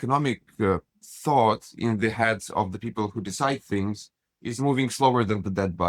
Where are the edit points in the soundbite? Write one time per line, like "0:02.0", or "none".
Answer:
none